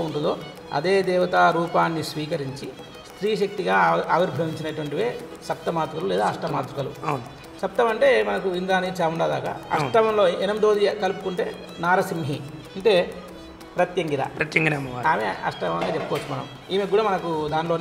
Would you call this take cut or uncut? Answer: uncut